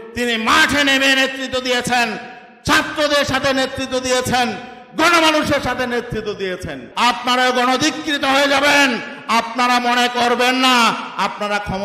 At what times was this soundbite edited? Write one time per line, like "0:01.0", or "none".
0:06.8